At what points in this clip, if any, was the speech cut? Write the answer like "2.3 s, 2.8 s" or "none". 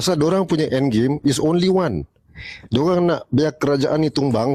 none